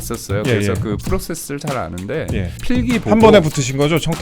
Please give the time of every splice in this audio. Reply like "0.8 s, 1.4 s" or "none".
2.6 s